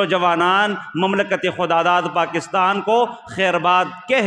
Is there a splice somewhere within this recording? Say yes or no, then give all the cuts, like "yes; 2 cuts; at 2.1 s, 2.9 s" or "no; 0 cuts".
no; 0 cuts